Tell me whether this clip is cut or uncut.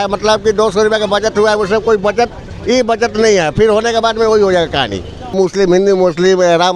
cut